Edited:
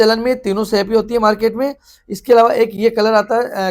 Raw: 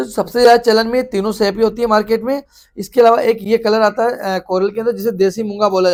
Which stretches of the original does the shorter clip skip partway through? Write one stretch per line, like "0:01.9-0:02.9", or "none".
none